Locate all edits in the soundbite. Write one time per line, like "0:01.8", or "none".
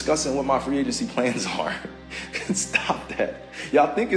none